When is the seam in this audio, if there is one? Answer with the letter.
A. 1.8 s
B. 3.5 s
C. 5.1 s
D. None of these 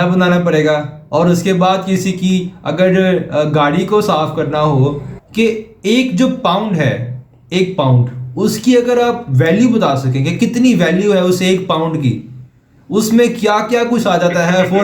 C